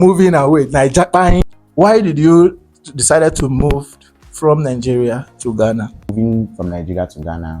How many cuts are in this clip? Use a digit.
2